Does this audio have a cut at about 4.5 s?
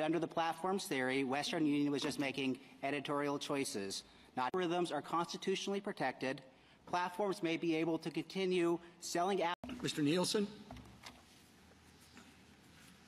yes; 2 cuts; at 4.5 s, 9.6 s

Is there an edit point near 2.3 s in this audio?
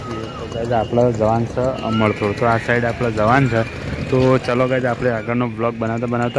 no; 0 cuts

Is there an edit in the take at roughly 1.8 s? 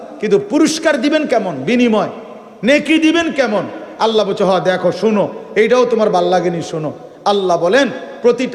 no; 0 cuts

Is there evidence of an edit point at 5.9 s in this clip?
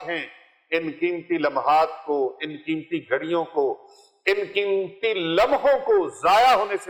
no; 0 cuts

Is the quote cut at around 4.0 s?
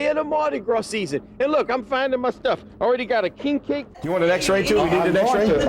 yes; 1 cut; at 4.0 s

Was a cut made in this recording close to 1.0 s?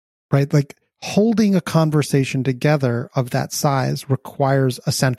no; 0 cuts

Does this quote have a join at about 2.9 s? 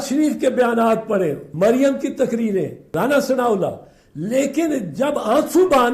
yes; 2 cuts; at 1.4 s, 2.9 s

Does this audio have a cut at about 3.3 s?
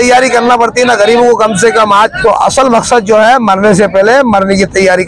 no; 1 cut; at 2.1 s

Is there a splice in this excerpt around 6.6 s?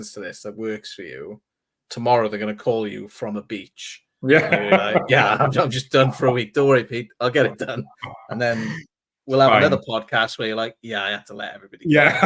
no; 0 cuts

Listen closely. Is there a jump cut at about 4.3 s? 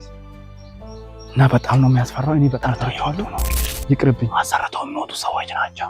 yes; 1 cut; at 4.3 s

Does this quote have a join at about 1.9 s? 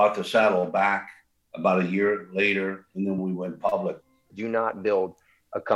no; 2 cuts; at 3.2 s, 4.3 s

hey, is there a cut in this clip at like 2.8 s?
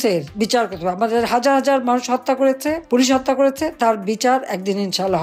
no; 0 cuts

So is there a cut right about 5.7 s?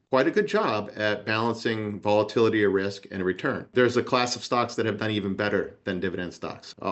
no; 1 cut; at 3.6 s

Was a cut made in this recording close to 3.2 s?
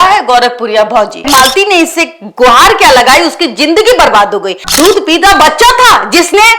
no; 2 cuts; at 1.3 s, 4.6 s

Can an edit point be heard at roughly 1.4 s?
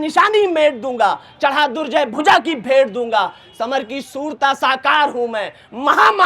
no; 0 cuts

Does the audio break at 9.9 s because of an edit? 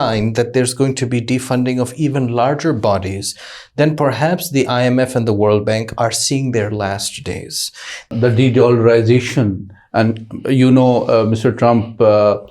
no; 1 cut; at 8.1 s

